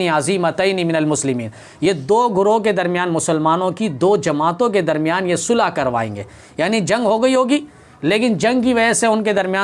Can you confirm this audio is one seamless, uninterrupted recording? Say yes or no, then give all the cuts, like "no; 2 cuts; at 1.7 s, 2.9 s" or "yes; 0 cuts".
yes; 0 cuts